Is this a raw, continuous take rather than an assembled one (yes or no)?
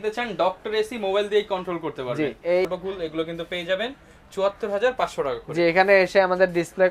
no